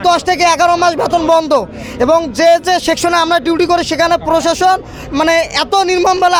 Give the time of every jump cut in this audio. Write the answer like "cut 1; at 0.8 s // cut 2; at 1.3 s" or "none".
none